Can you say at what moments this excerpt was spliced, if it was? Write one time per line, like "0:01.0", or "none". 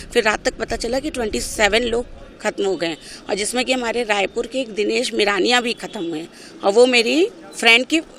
none

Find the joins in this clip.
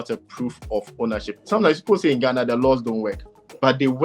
0:01.3

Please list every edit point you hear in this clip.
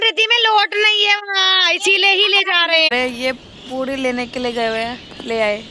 0:02.9

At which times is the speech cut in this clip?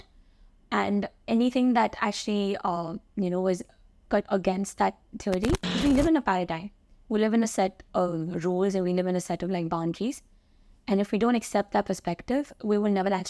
0:05.8

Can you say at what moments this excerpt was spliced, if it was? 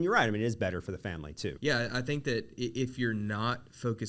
0:01.6

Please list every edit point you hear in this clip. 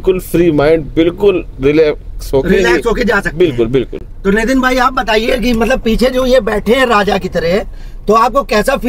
none

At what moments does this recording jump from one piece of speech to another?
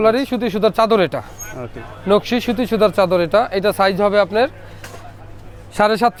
none

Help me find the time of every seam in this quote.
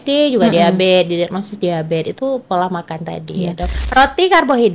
0:03.8

